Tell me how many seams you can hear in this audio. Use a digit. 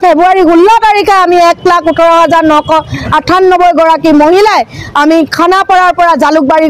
0